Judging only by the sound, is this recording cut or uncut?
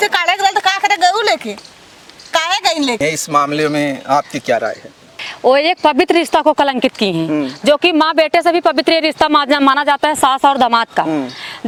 uncut